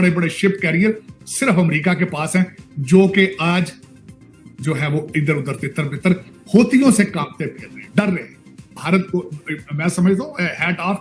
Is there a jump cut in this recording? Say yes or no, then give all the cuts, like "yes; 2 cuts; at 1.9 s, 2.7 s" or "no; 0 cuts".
yes; 1 cut; at 8.8 s